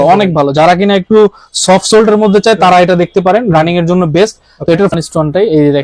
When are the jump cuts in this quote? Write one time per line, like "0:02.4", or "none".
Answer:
0:04.9